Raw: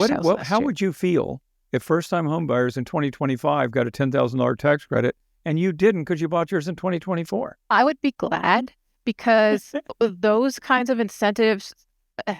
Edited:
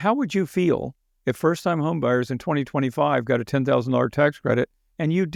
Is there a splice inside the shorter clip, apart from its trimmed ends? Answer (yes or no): no